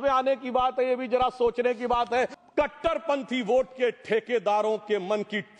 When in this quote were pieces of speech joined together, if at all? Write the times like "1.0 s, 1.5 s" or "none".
2.4 s